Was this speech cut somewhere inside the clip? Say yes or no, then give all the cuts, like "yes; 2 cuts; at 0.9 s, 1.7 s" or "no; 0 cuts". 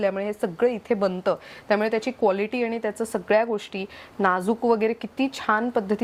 no; 0 cuts